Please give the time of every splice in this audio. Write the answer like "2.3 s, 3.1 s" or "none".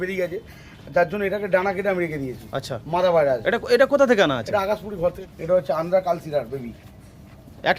5.2 s